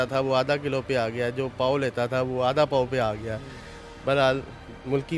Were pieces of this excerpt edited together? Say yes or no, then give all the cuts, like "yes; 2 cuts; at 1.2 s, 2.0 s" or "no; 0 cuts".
no; 0 cuts